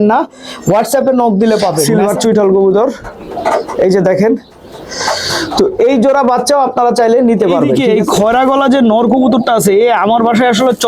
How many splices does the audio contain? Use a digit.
2